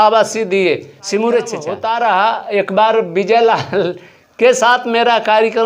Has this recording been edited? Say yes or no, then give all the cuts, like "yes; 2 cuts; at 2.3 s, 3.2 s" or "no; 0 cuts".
yes; 1 cut; at 1.7 s